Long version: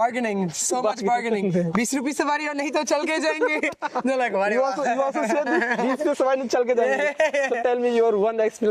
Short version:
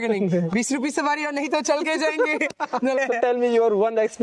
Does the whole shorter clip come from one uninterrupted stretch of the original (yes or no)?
no